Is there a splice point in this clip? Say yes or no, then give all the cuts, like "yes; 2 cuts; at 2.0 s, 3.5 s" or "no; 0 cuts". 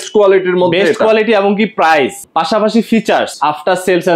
yes; 2 cuts; at 2.2 s, 3.3 s